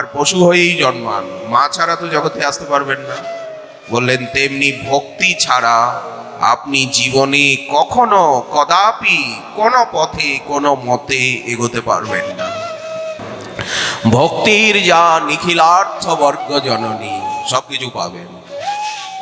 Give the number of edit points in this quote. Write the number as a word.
zero